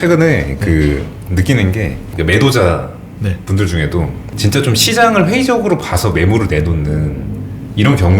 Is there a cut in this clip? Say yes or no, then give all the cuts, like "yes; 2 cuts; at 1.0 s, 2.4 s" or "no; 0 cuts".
yes; 2 cuts; at 2.0 s, 4.3 s